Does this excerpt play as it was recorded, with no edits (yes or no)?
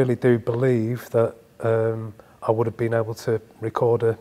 yes